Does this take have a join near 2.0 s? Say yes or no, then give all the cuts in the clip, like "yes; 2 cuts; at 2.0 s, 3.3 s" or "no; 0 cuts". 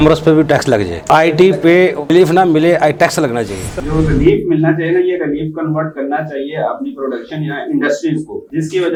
no; 0 cuts